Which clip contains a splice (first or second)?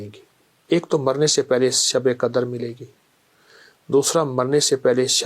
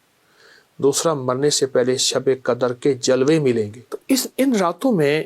second